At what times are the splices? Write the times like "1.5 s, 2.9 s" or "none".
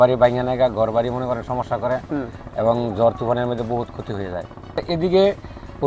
4.8 s

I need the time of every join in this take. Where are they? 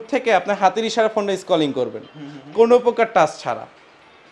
none

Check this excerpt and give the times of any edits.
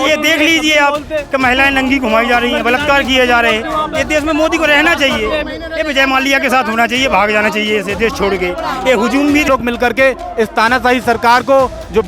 9.5 s

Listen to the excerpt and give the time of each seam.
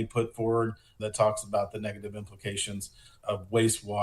1.0 s, 3.2 s

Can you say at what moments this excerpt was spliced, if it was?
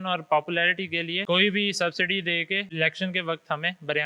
1.2 s, 2.7 s

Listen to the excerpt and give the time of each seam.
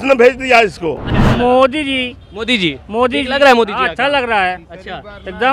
1.2 s

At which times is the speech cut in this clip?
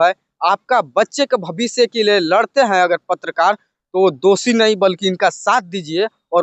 none

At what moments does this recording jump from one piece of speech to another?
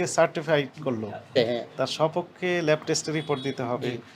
1.4 s

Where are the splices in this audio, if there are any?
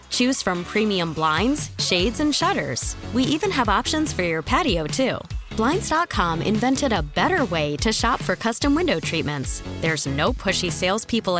none

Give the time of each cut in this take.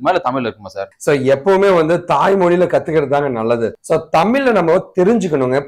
none

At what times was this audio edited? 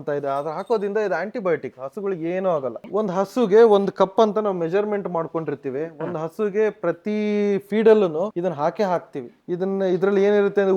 2.8 s, 8.3 s

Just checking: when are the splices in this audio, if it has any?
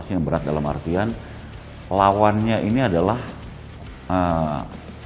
none

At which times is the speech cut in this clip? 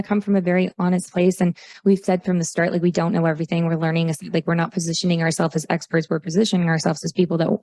none

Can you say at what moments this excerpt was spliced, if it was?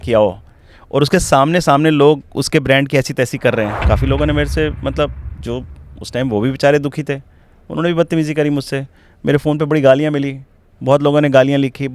3.8 s

